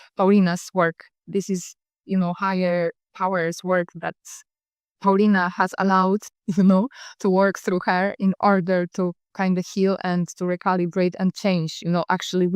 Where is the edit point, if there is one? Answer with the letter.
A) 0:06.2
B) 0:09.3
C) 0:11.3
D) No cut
B